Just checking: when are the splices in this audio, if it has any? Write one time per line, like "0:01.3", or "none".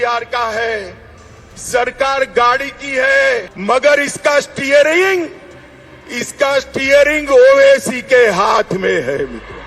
0:03.5